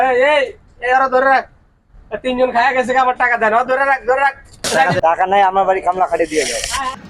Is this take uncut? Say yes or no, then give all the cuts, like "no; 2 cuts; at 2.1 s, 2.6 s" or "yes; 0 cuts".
no; 1 cut; at 4.6 s